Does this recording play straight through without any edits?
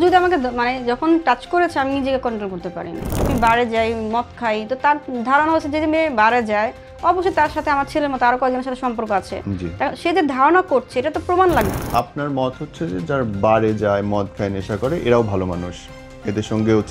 no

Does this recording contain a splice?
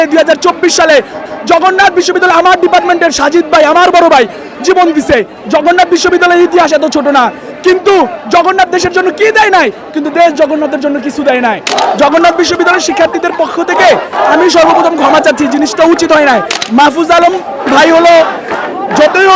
yes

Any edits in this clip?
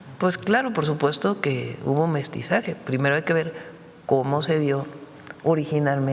no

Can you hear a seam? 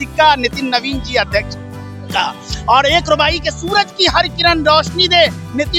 no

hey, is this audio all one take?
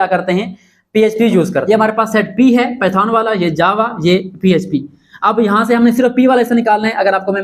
no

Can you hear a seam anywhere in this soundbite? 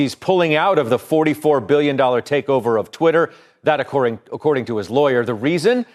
no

